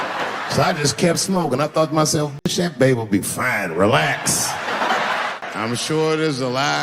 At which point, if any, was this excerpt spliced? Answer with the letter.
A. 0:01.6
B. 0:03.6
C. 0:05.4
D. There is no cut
C